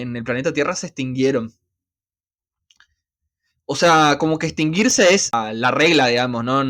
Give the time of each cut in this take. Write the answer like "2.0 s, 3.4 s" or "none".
5.4 s